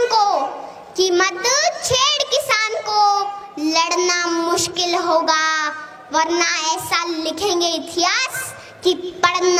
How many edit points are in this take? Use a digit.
0